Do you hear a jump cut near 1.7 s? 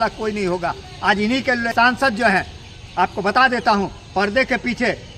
yes; 1 cut; at 1.7 s

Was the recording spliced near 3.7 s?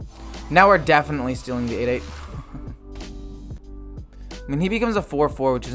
yes; 1 cut; at 3.7 s

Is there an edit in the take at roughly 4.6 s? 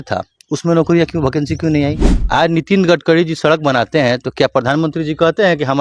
no; 1 cut; at 2.1 s

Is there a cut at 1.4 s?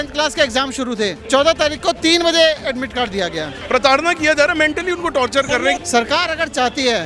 no; 2 cuts; at 3.5 s, 5.8 s

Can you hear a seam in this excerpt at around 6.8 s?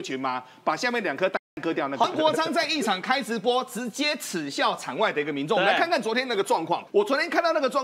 yes; 2 cuts; at 2.0 s, 6.8 s

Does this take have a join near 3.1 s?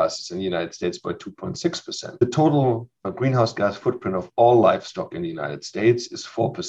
yes; 2 cuts; at 2.1 s, 3.1 s

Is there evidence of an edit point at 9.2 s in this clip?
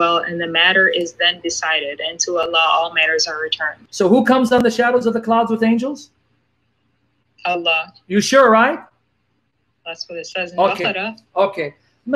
no; 2 cuts; at 3.8 s, 11.2 s

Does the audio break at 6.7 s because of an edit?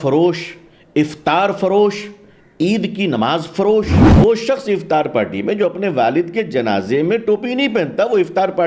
no; 1 cut; at 4.0 s

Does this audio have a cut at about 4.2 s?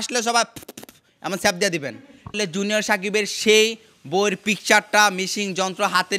no; 1 cut; at 2.4 s

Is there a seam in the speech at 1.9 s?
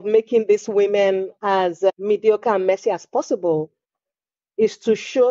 yes; 1 cut; at 1.9 s

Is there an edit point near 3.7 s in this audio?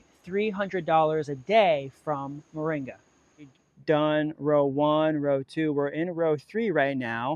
yes; 1 cut; at 3.7 s

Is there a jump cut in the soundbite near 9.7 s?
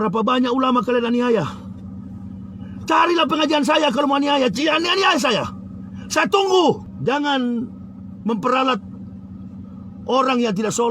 no; 1 cut; at 6.9 s

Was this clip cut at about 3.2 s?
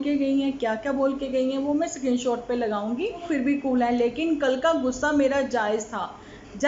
yes; 1 cut; at 3.2 s

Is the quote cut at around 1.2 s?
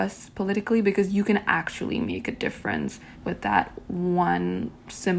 no; 1 cut; at 3.1 s

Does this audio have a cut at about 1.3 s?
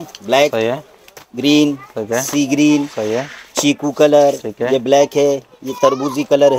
no; 0 cuts

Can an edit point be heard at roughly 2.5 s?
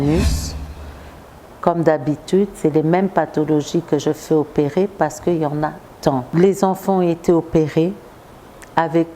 no; 1 cut; at 6.3 s

